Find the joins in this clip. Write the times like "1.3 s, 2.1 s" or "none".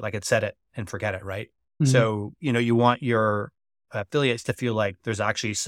none

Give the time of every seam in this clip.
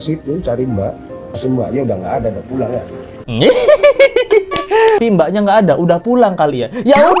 1.2 s, 5.0 s

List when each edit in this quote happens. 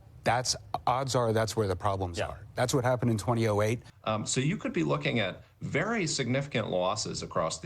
3.9 s

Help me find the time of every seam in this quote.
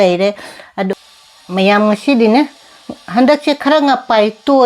1.0 s

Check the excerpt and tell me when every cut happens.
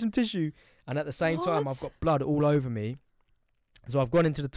none

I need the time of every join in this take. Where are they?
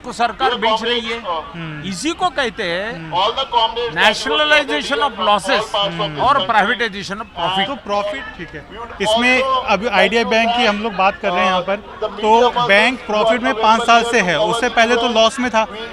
8.0 s

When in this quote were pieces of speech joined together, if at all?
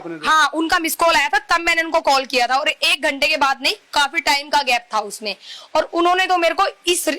none

